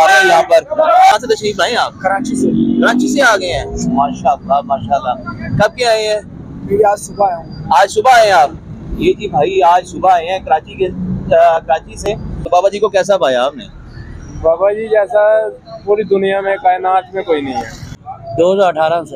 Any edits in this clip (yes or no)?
yes